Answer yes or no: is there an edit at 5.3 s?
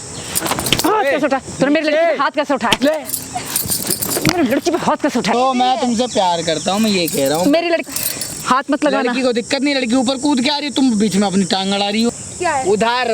yes